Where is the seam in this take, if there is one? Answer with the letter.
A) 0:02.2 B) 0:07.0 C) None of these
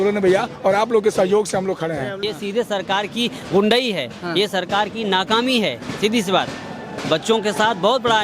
A